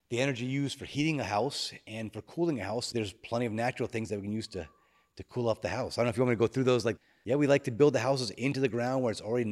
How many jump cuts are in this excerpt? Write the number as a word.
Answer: two